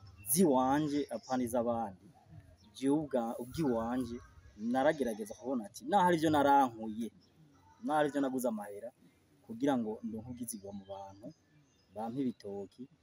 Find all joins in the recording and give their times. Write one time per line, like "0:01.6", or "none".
none